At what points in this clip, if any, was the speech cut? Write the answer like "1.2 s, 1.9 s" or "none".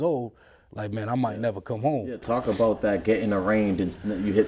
none